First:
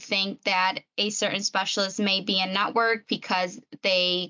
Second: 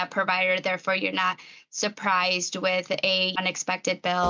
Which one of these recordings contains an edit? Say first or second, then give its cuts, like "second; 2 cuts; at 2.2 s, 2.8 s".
second; 1 cut; at 3.3 s